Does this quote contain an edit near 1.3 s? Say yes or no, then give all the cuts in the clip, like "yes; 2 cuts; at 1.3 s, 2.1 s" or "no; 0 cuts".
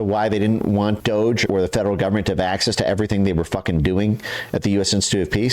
yes; 1 cut; at 1.3 s